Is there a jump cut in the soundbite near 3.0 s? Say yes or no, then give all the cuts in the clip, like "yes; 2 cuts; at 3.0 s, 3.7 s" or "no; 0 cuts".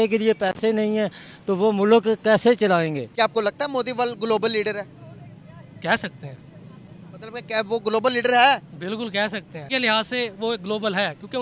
yes; 2 cuts; at 3.0 s, 9.6 s